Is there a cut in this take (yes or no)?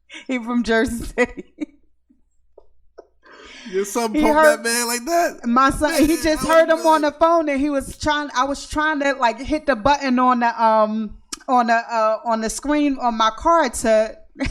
no